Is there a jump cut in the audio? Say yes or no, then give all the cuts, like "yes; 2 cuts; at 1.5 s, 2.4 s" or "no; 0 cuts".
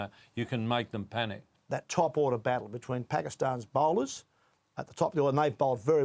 yes; 1 cut; at 1.6 s